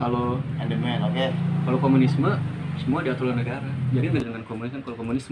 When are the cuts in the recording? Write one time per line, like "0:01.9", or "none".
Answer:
0:04.2

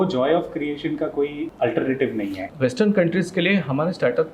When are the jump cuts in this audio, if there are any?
0:01.4
0:02.4

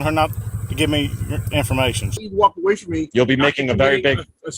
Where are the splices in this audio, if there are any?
0:02.1

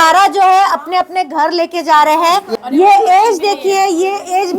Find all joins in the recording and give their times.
0:02.5

